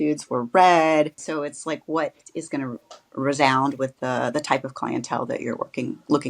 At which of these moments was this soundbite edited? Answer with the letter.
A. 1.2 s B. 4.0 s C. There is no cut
A